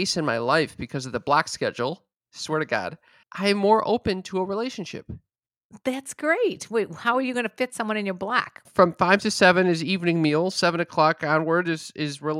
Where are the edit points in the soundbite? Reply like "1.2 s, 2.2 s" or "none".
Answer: 3.2 s, 8.6 s